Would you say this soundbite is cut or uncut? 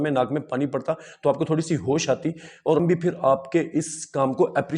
cut